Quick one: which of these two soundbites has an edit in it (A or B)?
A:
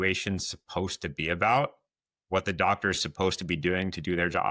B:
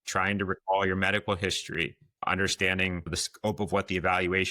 B